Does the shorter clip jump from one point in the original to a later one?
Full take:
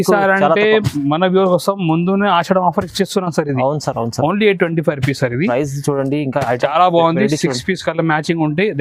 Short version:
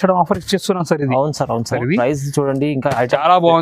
yes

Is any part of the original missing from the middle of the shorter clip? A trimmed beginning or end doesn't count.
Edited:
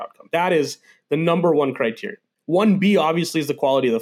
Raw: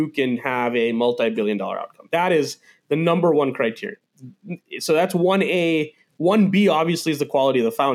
yes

